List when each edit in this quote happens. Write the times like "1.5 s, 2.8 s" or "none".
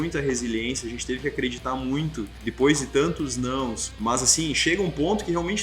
2.4 s, 3.9 s